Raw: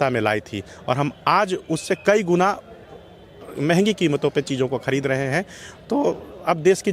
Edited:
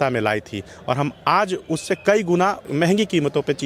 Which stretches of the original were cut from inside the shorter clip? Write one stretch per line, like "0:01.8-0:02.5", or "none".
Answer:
0:02.6-0:03.5